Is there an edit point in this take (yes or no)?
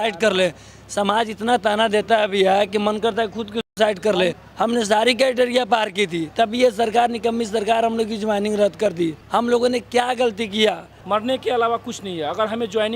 yes